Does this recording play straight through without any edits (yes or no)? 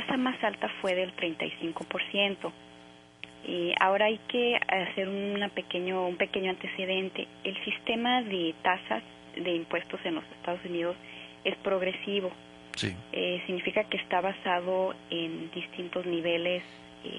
no